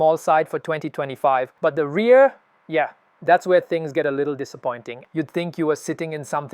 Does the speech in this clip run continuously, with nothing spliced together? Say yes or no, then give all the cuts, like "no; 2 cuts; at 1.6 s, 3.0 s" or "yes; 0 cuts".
no; 2 cuts; at 1.5 s, 4.9 s